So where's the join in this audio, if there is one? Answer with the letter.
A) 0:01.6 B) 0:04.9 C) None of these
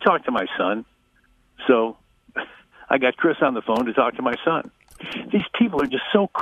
B